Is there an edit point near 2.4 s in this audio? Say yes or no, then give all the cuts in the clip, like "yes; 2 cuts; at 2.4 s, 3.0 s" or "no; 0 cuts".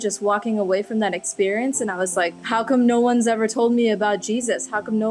yes; 1 cut; at 2.4 s